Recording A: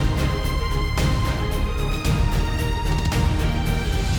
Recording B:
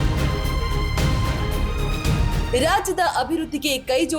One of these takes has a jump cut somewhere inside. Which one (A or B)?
B